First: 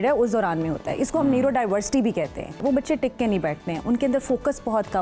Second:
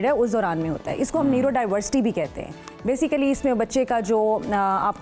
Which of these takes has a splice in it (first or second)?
first